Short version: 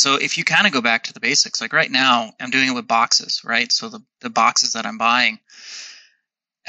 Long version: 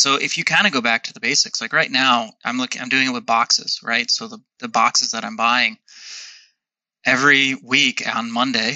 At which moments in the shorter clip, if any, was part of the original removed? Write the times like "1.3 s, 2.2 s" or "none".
2.4 s